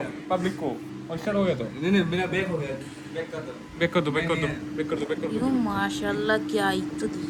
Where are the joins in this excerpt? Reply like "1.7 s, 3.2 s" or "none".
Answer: none